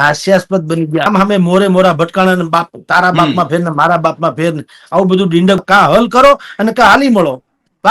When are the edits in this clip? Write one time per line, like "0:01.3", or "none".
0:01.0
0:05.6